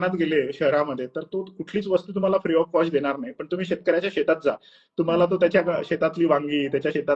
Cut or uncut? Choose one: uncut